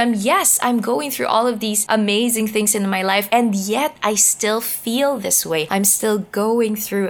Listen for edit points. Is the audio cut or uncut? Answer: cut